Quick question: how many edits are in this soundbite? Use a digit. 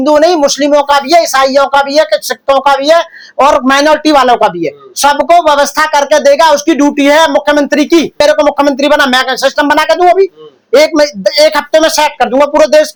0